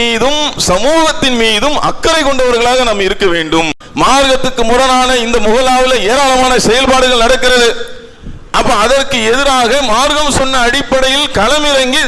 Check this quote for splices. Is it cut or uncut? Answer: cut